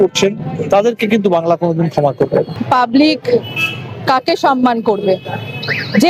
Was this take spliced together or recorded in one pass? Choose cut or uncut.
cut